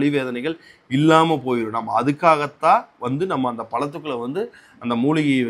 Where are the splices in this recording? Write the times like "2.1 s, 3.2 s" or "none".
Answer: none